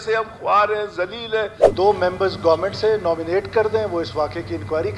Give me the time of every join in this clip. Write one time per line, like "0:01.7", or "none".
0:01.6